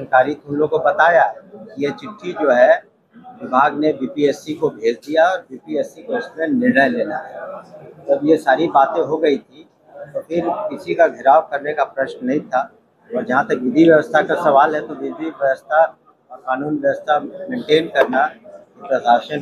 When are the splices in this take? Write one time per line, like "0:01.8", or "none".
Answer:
none